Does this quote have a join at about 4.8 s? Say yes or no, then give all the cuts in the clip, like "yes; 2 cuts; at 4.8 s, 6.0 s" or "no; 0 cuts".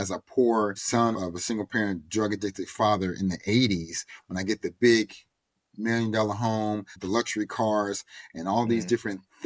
no; 2 cuts; at 1.0 s, 6.9 s